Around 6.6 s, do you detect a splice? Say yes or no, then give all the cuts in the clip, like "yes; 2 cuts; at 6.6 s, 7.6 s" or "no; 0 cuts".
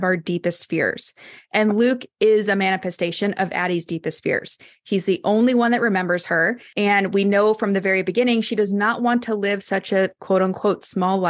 yes; 1 cut; at 6.6 s